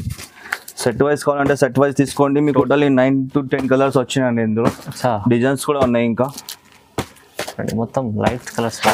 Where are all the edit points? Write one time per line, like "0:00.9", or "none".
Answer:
0:02.6